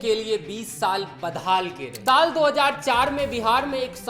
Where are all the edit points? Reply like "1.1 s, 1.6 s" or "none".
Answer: 1.9 s